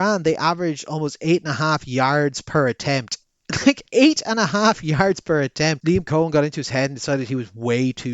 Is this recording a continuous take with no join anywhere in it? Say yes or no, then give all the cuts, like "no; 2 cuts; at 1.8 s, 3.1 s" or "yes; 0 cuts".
no; 1 cut; at 5.8 s